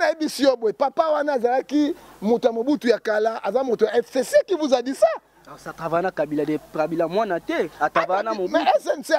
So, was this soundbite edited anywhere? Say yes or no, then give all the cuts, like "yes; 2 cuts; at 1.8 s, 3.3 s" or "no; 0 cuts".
no; 0 cuts